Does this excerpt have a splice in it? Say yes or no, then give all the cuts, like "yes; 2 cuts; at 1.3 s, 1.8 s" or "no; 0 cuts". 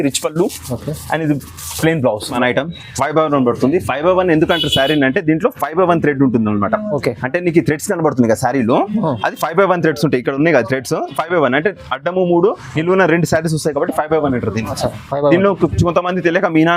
yes; 1 cut; at 2.4 s